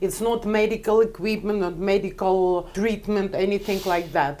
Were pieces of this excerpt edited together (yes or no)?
yes